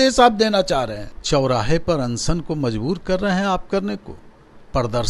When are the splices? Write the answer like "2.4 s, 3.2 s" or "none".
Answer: 1.1 s